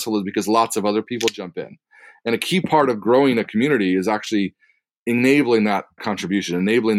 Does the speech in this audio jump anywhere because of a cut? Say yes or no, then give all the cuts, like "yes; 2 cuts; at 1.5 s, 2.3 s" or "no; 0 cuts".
no; 0 cuts